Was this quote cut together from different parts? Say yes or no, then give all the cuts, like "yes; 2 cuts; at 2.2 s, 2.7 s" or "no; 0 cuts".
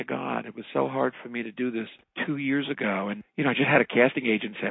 yes; 1 cut; at 3.2 s